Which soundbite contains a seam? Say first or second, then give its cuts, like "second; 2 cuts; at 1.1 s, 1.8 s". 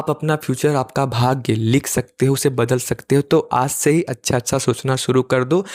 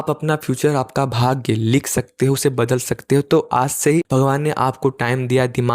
second; 1 cut; at 4.1 s